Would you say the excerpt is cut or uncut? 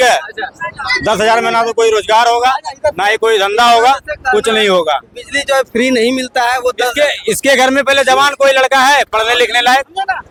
uncut